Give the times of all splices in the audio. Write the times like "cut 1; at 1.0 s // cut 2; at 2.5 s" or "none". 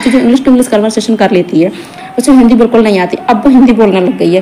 none